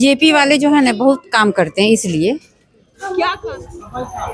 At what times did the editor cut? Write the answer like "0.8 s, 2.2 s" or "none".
3.4 s